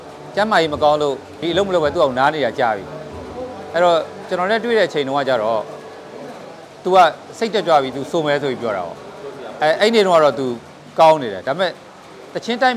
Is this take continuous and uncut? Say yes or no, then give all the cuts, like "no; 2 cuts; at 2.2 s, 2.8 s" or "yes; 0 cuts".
no; 1 cut; at 1.3 s